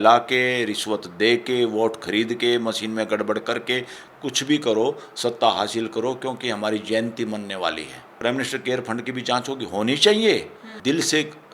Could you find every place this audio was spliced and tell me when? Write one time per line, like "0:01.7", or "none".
0:08.0
0:10.6

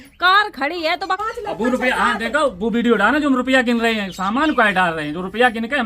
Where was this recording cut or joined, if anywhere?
0:01.2

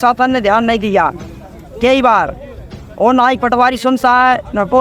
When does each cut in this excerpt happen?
none

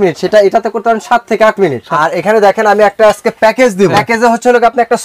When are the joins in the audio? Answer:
0:01.9
0:04.0

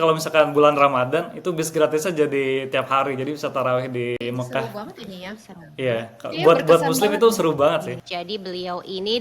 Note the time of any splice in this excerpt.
0:04.2
0:08.0

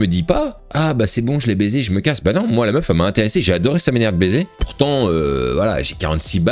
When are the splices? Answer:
0:04.5

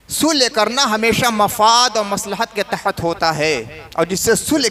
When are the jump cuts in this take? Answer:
none

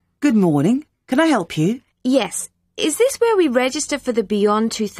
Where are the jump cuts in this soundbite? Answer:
0:01.9

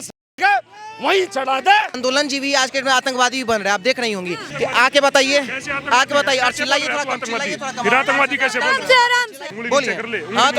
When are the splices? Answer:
0:02.0
0:04.4
0:09.5

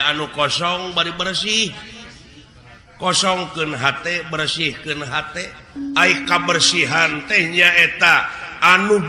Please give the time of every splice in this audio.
0:05.6

